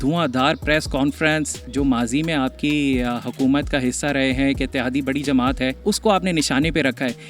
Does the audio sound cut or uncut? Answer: cut